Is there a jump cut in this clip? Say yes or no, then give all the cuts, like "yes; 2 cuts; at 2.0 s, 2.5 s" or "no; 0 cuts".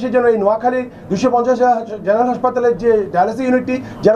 no; 0 cuts